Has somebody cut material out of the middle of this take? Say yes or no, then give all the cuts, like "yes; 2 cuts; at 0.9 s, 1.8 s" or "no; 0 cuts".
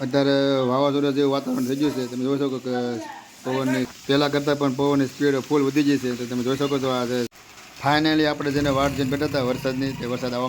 yes; 2 cuts; at 3.9 s, 7.4 s